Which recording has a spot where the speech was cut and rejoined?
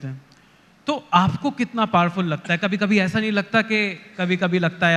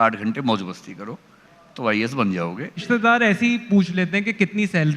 second; 1 cut; at 2.8 s

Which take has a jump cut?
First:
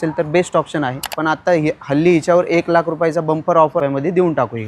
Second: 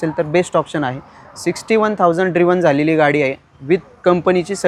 first; 2 cuts; at 1.1 s, 3.8 s

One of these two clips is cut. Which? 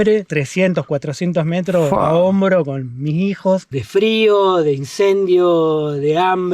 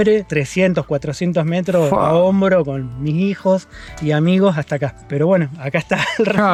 first; 1 cut; at 3.8 s

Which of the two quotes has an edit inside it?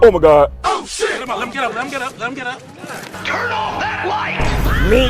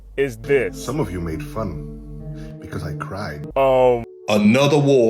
second; 2 cuts; at 3.4 s, 4.1 s

